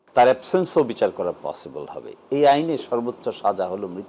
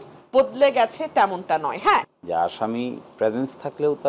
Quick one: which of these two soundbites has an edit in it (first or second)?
second